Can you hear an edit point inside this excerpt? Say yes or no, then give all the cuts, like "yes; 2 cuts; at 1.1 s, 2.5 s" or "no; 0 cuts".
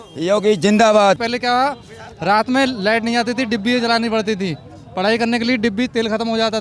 yes; 1 cut; at 1.3 s